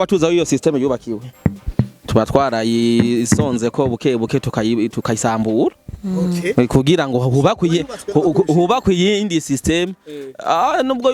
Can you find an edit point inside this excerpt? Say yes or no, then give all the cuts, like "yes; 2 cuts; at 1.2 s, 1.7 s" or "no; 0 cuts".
no; 0 cuts